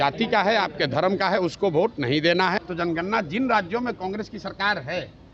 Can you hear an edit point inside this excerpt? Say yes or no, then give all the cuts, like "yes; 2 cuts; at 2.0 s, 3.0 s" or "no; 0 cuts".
yes; 1 cut; at 2.5 s